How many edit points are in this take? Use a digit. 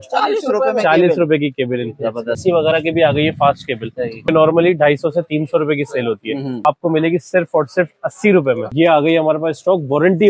4